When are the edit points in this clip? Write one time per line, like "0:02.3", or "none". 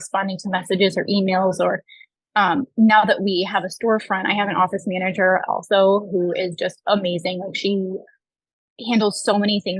none